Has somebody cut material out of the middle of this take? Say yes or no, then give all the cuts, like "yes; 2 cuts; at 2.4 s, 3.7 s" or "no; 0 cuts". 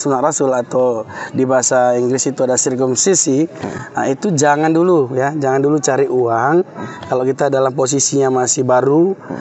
no; 0 cuts